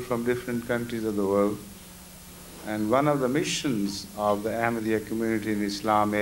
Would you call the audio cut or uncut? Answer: uncut